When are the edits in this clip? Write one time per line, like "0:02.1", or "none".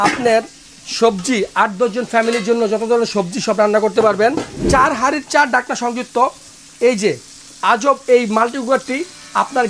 0:04.5